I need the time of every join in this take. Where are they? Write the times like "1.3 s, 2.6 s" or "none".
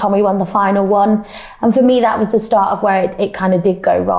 none